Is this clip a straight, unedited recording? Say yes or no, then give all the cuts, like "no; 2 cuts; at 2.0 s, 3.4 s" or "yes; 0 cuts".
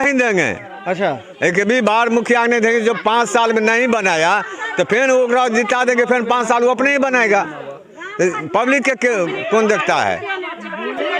yes; 0 cuts